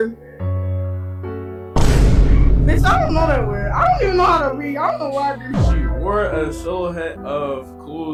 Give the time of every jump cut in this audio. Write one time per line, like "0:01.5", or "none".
none